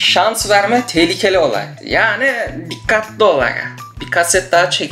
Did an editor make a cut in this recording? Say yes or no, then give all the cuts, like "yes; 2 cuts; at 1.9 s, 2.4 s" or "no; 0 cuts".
yes; 1 cut; at 1.7 s